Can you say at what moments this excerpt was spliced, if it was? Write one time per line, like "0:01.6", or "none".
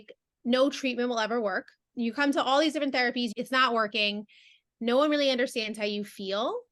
0:01.8
0:03.3

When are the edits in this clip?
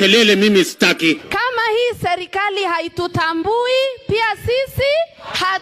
0:01.3

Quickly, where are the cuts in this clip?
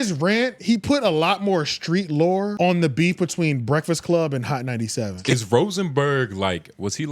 0:02.5
0:05.2

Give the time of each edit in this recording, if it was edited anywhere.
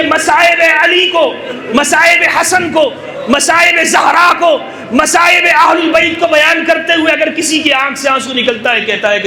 none

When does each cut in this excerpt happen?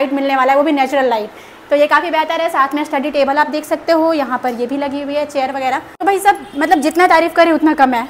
none

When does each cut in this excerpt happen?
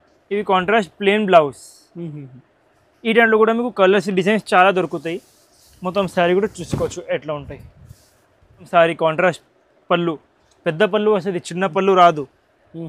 0:08.7

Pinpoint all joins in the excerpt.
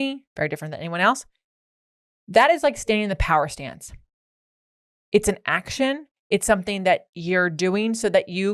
none

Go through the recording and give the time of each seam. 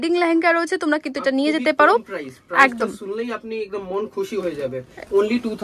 none

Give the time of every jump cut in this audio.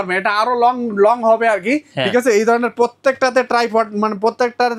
none

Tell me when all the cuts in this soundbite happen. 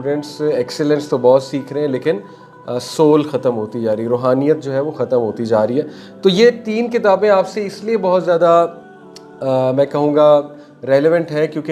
none

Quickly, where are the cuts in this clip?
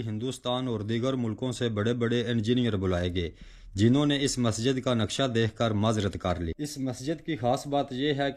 0:06.6

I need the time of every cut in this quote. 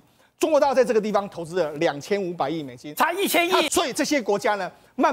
0:03.7

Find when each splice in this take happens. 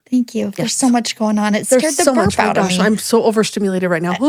none

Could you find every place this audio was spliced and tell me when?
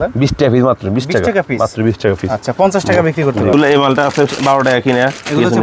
0:03.5

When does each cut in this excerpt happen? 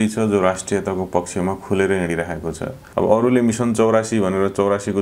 0:02.8

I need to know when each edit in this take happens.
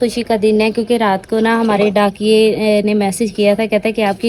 none

